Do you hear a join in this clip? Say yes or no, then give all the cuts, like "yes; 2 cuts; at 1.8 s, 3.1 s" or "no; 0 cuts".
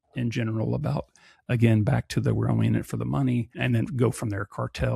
yes; 1 cut; at 3.5 s